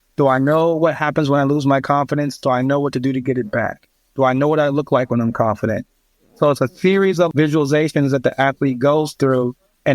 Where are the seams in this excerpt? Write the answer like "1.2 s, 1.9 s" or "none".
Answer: 7.3 s